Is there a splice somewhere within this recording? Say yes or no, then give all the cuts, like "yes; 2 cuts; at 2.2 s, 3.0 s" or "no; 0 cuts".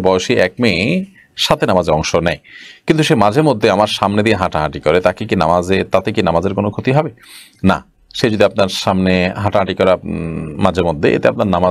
no; 0 cuts